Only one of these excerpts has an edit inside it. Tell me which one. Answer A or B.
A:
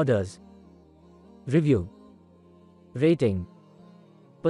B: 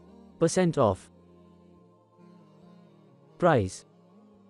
B